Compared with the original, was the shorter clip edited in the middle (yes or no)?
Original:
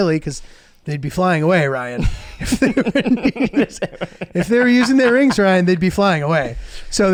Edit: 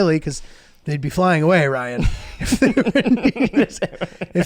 no